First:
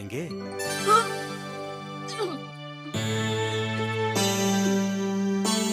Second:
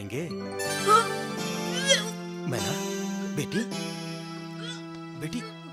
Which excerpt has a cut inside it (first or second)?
second